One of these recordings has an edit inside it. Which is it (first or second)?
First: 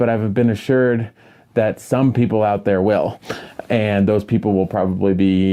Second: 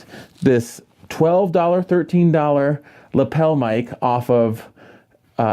second